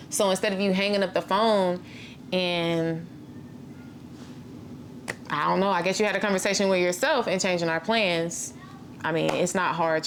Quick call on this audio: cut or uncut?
uncut